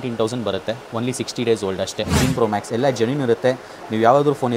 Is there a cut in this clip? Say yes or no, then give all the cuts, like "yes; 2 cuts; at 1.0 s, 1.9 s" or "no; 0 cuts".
yes; 1 cut; at 2.2 s